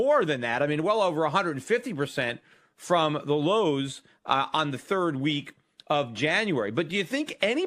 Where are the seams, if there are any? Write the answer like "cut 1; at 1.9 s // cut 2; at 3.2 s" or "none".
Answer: none